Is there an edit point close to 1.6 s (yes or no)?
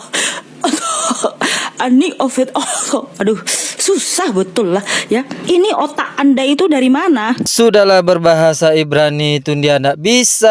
no